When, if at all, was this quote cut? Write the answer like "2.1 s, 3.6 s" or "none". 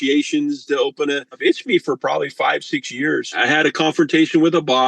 1.3 s, 3.3 s